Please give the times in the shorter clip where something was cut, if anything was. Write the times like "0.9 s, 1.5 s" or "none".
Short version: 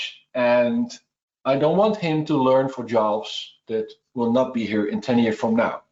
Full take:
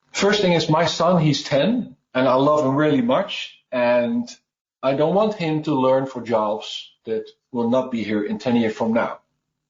none